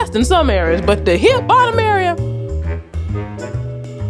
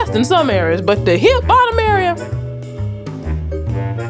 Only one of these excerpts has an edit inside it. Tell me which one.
second; 1 cut; at 2.2 s

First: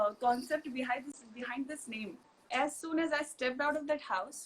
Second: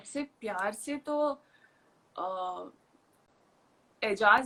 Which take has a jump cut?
first; 1 cut; at 2.5 s

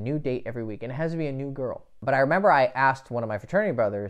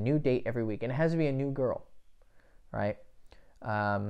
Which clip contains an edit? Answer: first; 1 cut; at 1.9 s

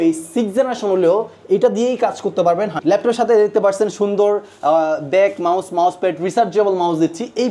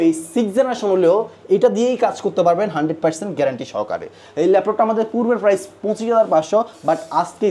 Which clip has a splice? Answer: first; 1 cut; at 2.8 s

